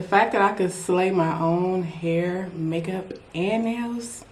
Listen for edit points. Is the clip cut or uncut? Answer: uncut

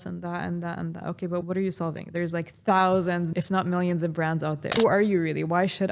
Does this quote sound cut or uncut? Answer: cut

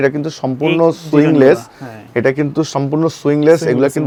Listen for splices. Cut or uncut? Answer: uncut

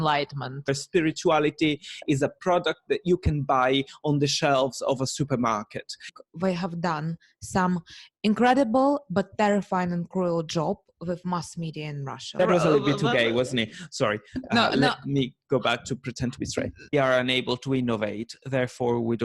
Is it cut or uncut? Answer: cut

